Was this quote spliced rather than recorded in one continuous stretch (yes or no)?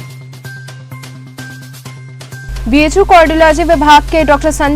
yes